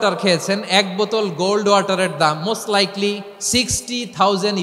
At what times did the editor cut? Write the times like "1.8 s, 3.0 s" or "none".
3.3 s